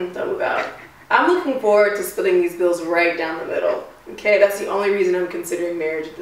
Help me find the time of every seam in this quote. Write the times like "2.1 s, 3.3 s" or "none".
none